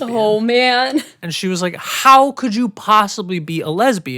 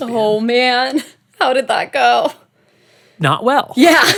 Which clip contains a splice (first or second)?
first